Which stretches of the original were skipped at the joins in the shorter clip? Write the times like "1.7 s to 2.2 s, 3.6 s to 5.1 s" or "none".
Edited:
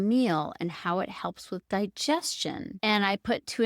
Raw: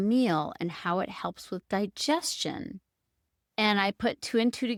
2.7 s to 3.4 s